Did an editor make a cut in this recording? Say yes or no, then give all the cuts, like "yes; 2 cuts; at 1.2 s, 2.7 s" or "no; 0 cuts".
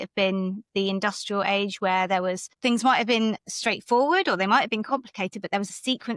no; 0 cuts